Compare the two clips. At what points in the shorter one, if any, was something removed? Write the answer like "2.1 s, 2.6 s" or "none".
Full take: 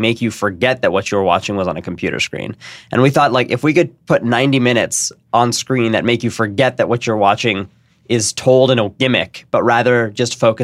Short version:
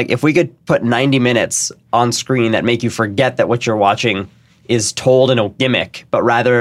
none